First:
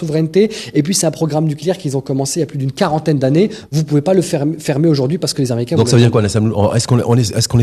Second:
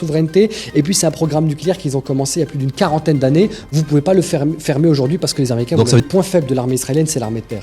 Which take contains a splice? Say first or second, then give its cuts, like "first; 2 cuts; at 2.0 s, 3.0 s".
second; 1 cut; at 6.0 s